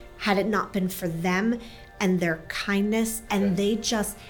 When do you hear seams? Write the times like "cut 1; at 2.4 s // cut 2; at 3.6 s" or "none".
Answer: cut 1; at 3.2 s